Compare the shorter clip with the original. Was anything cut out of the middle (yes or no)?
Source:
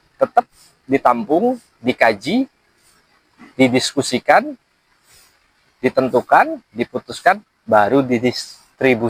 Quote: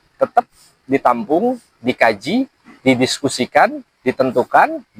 yes